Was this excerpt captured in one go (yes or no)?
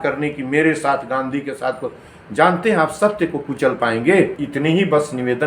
no